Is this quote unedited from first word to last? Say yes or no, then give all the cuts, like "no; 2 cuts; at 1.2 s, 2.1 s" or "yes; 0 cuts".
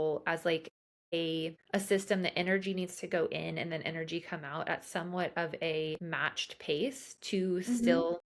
yes; 0 cuts